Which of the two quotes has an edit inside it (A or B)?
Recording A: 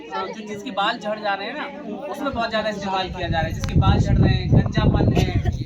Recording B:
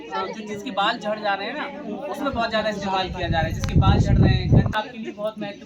B